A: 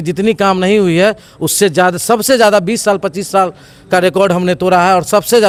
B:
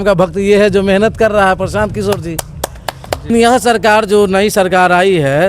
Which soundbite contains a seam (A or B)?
B